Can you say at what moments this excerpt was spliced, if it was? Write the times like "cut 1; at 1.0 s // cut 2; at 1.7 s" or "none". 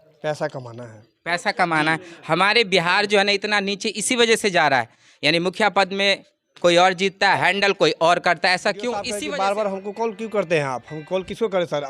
cut 1; at 9.1 s